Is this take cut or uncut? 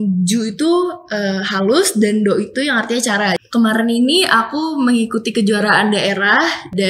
cut